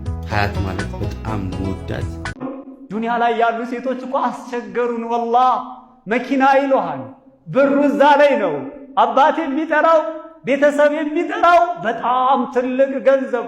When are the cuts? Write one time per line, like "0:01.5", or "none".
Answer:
0:02.2